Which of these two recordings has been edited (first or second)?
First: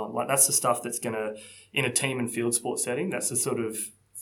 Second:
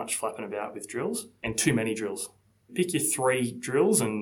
second